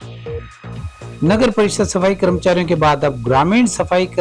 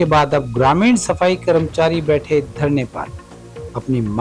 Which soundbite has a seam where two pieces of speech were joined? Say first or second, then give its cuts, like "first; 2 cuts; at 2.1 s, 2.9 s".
first; 1 cut; at 1.2 s